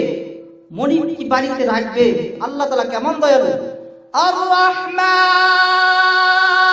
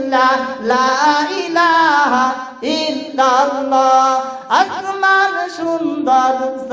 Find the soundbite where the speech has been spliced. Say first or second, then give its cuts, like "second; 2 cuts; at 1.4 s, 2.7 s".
first; 1 cut; at 2.4 s